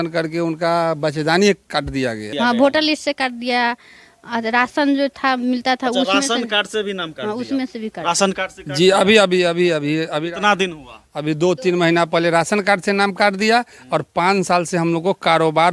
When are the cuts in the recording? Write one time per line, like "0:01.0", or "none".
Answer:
0:02.3